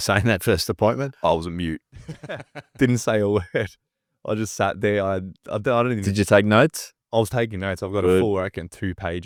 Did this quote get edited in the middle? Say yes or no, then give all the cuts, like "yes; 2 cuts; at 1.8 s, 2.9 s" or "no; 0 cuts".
no; 0 cuts